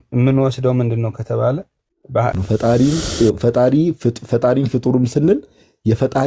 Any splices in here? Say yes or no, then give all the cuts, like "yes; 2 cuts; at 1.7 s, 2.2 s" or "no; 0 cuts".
yes; 1 cut; at 2.4 s